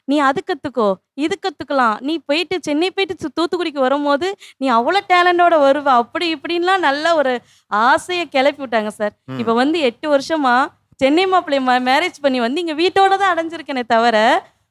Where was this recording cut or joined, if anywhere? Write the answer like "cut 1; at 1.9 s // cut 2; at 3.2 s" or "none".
none